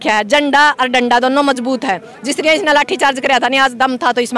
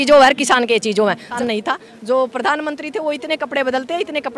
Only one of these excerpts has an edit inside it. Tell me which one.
second; 1 cut; at 1.3 s

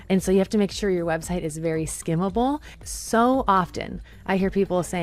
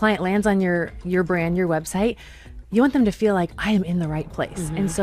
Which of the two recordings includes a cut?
first; 1 cut; at 2.7 s

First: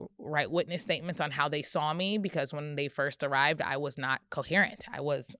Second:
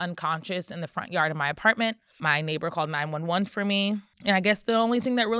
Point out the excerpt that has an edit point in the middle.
second; 2 cuts; at 2.2 s, 4.1 s

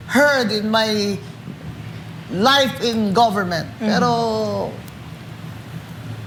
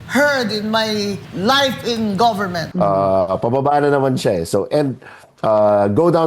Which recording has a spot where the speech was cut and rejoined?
second; 2 cuts; at 1.3 s, 2.6 s

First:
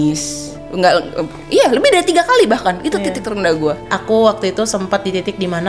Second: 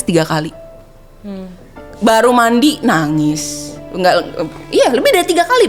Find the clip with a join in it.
first; 1 cut; at 3.9 s

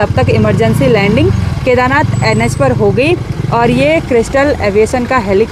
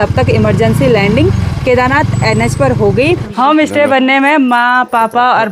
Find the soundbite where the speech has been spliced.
second; 1 cut; at 3.3 s

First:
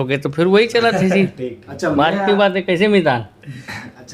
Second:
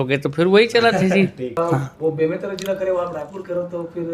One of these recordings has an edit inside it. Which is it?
second; 1 cut; at 1.5 s

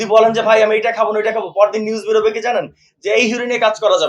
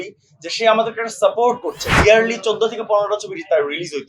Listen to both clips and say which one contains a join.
second; 1 cut; at 1.8 s

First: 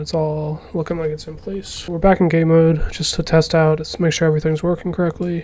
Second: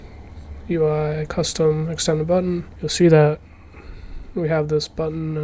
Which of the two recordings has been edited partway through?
first; 1 cut; at 1.7 s

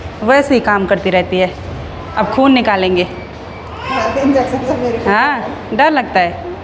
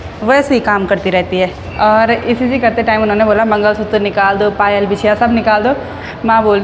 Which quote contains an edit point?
second; 1 cut; at 1.6 s

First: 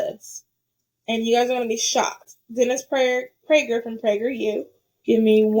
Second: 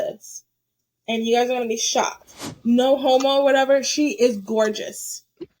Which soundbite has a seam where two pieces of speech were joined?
second; 1 cut; at 2.3 s

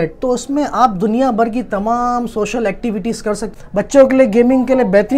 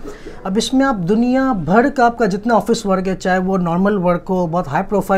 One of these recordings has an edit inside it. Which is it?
first; 1 cut; at 3.5 s

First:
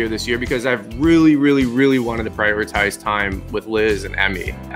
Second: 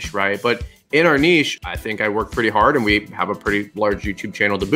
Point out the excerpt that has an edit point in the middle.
second; 1 cut; at 1.7 s

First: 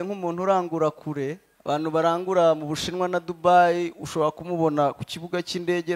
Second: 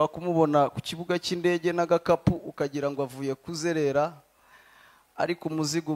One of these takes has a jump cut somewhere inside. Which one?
first; 1 cut; at 1.5 s

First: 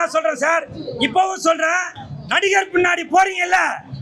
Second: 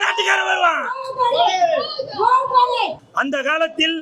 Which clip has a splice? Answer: second; 1 cut; at 3.0 s

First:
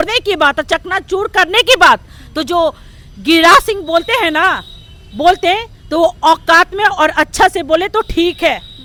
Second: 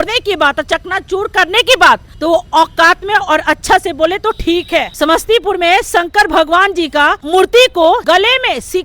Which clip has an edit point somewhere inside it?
second; 4 cuts; at 2.1 s, 4.9 s, 7.2 s, 8.0 s

